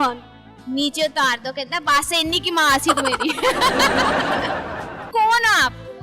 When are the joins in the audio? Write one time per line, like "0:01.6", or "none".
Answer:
0:05.1